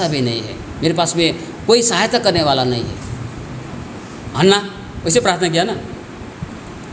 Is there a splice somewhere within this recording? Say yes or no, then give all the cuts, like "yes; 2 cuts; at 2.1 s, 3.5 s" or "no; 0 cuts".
yes; 1 cut; at 3.7 s